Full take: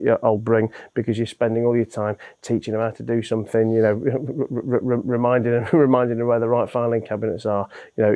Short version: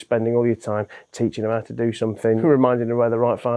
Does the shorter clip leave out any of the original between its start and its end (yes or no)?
yes